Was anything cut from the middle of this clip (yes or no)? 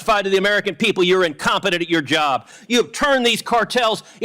yes